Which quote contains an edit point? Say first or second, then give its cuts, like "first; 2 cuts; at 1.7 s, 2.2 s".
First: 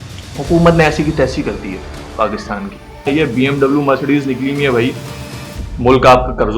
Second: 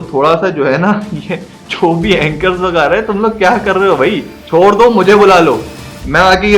first; 1 cut; at 3.1 s